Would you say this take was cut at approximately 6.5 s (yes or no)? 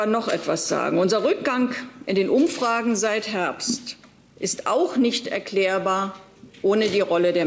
no